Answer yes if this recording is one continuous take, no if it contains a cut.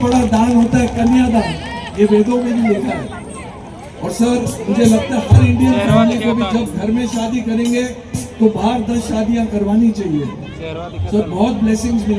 yes